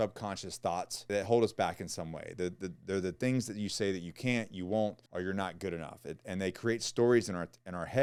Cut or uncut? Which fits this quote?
uncut